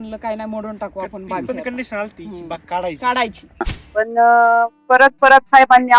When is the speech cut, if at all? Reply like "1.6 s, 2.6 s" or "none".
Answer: 3.6 s